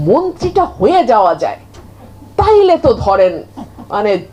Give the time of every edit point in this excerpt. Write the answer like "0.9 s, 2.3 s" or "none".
none

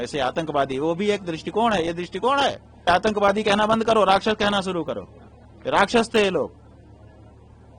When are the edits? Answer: 2.9 s

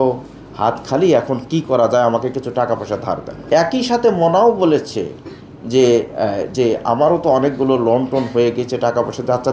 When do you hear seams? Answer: 3.3 s

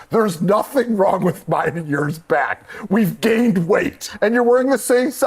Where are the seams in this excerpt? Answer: 4.1 s

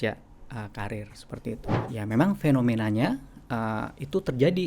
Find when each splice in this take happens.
1.7 s

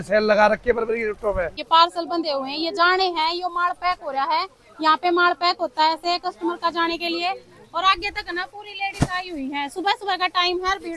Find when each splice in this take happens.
1.5 s

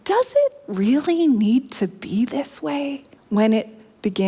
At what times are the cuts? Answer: 3.1 s

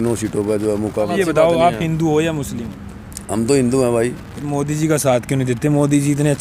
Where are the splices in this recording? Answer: 1.1 s

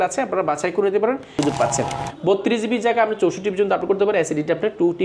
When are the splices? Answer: 1.4 s

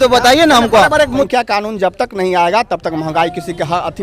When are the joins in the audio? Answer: 1.3 s

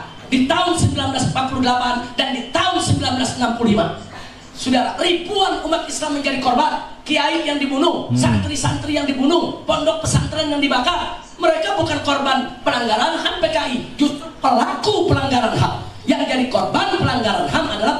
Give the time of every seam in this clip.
none

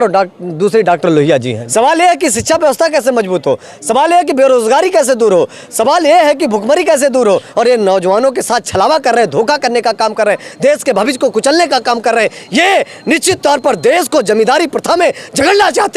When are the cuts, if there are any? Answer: 1.6 s, 7.5 s

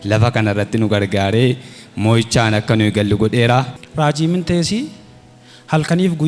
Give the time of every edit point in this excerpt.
3.7 s

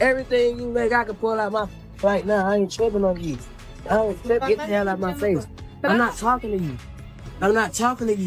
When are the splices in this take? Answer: 4.5 s

